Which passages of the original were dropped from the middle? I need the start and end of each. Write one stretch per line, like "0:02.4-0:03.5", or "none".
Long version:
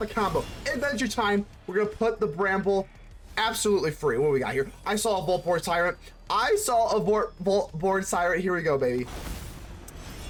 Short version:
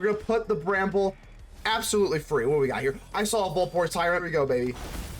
0:06.0-0:08.6